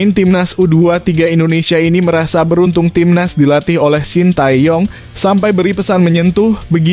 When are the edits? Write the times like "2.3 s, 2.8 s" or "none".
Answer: 5.0 s